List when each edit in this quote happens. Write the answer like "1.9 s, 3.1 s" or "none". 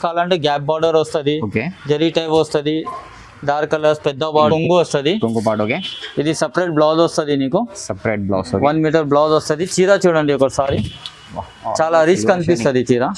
4.5 s